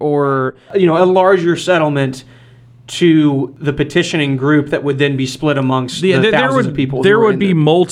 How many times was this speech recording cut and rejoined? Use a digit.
1